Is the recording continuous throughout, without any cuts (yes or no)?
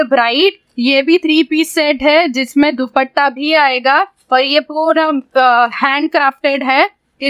yes